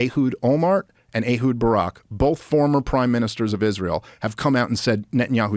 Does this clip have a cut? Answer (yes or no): no